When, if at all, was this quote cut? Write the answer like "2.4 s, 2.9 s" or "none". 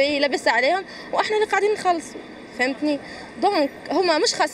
none